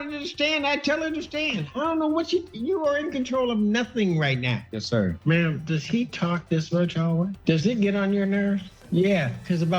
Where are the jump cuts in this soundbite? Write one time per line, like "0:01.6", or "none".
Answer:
0:05.2
0:07.4